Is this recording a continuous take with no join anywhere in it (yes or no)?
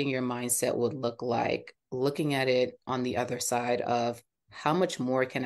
yes